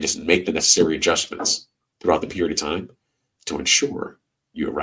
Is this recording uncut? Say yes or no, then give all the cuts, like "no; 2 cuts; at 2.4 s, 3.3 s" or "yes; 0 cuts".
yes; 0 cuts